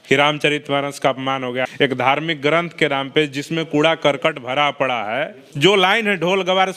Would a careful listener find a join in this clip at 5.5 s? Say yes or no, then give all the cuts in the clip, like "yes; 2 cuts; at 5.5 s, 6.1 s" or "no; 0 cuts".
yes; 2 cuts; at 1.7 s, 5.5 s